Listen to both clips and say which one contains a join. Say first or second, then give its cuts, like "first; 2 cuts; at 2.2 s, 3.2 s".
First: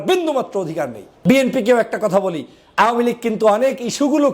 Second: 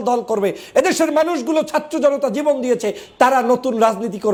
first; 1 cut; at 1.1 s